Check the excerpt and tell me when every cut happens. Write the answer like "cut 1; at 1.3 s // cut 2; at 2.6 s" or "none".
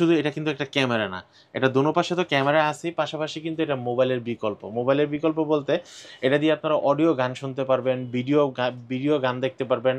none